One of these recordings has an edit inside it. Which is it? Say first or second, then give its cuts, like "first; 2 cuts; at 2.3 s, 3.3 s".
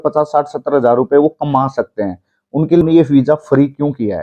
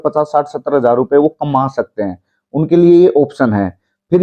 first; 1 cut; at 2.8 s